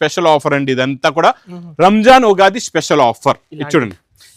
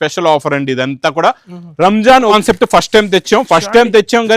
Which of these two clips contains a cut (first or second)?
second